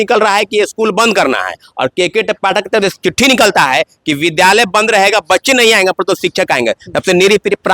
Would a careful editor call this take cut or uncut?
uncut